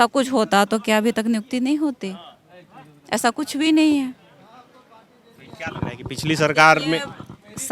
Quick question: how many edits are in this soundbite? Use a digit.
0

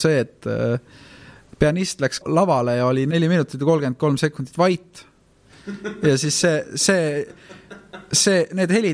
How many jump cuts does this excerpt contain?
2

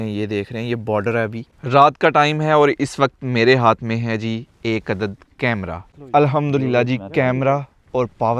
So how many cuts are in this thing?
2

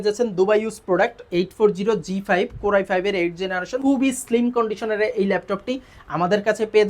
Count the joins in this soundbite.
1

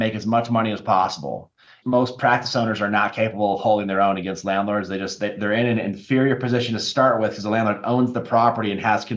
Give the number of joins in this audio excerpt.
1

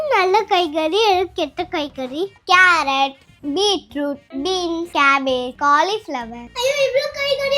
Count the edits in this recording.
1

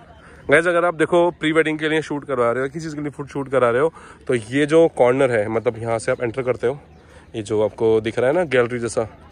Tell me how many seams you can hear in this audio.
0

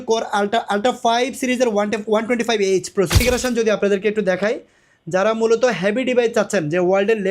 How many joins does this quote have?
1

